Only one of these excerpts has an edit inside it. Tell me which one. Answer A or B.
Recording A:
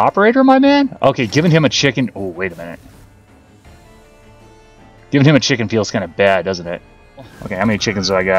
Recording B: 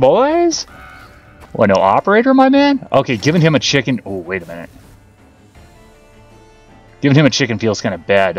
A